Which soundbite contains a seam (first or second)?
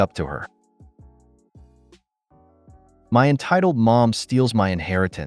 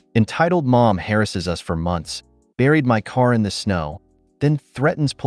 first